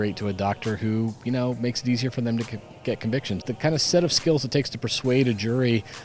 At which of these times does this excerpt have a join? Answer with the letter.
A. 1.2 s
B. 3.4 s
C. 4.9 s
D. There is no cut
B